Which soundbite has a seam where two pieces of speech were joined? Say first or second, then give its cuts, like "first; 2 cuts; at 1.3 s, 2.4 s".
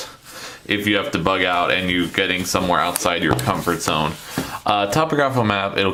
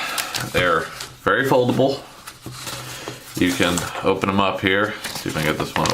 second; 1 cut; at 5.0 s